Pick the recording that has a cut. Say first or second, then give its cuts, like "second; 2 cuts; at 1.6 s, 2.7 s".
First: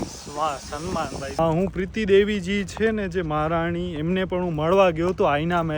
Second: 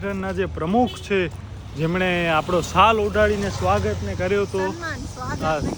first; 1 cut; at 1.4 s